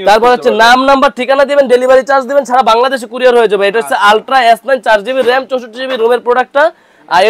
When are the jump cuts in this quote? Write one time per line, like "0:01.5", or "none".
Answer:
none